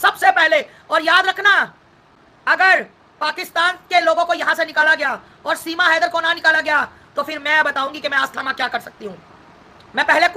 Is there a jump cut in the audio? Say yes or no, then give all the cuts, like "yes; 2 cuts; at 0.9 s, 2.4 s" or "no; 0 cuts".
no; 0 cuts